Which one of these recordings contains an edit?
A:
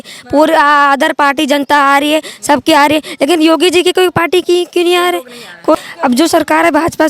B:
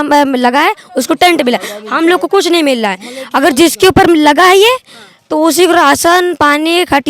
A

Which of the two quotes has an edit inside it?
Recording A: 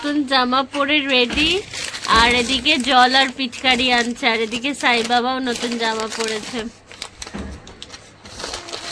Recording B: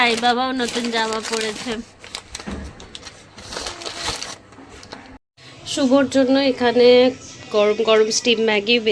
B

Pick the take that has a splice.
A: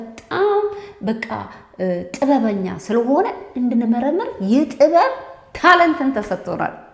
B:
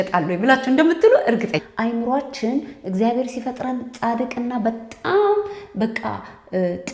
B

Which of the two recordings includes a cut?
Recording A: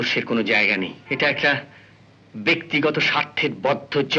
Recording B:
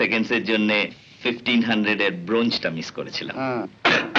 A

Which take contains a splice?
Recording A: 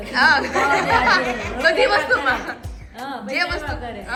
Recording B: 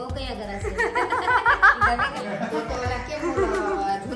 B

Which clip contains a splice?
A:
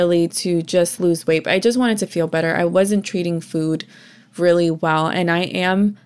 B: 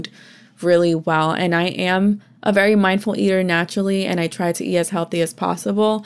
A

